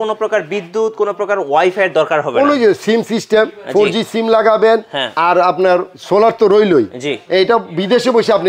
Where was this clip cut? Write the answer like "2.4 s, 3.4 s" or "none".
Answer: none